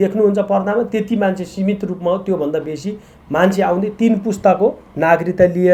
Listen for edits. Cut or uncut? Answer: uncut